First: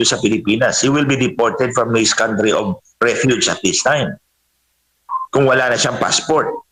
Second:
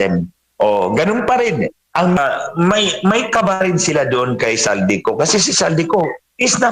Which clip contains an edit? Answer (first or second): second